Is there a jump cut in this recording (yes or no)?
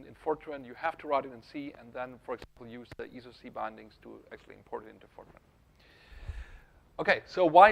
yes